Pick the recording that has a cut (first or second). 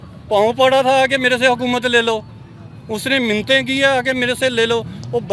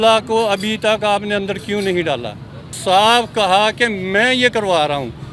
second